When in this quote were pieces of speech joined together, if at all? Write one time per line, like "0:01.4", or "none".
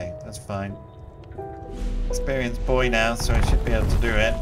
none